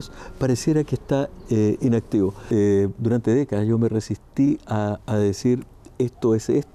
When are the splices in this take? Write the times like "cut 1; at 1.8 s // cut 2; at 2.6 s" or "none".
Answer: cut 1; at 2.4 s